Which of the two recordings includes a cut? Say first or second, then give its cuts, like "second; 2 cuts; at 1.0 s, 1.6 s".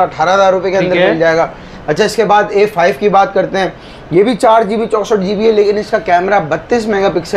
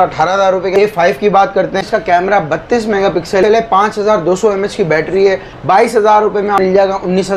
second; 5 cuts; at 0.7 s, 1.8 s, 3.4 s, 5.5 s, 6.6 s